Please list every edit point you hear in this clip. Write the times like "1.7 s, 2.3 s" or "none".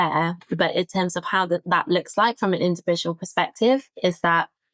none